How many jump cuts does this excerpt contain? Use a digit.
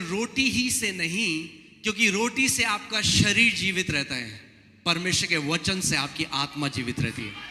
0